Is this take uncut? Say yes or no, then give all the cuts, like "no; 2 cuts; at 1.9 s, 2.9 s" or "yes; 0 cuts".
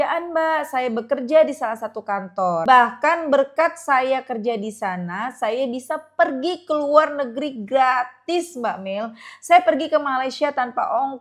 no; 1 cut; at 2.6 s